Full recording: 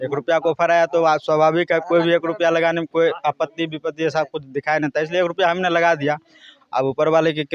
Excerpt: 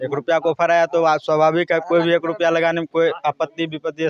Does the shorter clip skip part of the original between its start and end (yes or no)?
no